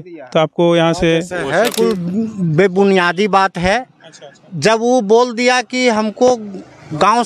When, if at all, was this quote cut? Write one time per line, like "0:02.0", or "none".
0:01.7